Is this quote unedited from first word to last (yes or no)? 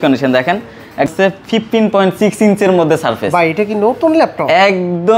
no